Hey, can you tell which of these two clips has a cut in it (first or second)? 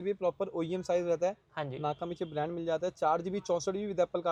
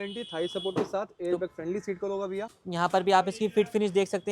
second